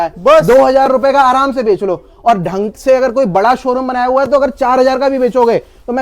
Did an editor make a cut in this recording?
no; 0 cuts

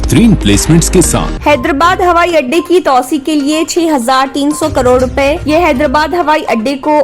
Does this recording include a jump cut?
yes; 1 cut; at 1.3 s

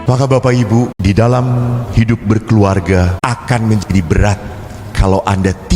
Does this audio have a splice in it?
yes; 2 cuts; at 1.0 s, 3.1 s

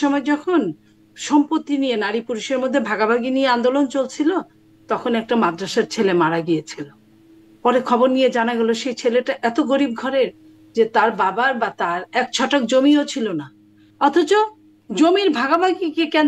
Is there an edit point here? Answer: no; 0 cuts

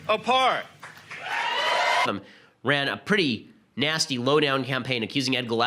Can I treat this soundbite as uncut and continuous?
yes; 0 cuts

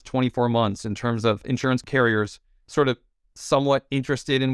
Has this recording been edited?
yes; 1 cut; at 1.8 s

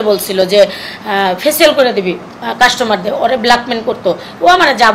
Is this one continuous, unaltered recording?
yes; 0 cuts

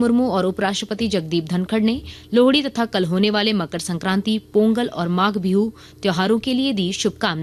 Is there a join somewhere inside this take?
no; 0 cuts

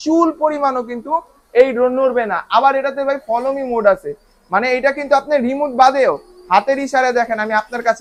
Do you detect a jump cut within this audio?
no; 0 cuts

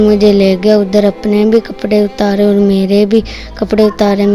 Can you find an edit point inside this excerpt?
no; 0 cuts

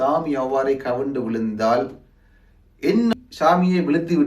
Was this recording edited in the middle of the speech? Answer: yes; 1 cut; at 3.1 s

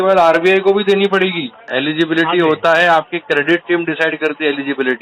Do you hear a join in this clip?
yes; 1 cut; at 1.7 s

